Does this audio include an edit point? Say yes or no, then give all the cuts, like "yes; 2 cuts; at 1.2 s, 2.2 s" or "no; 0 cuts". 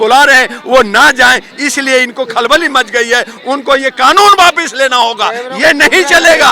no; 0 cuts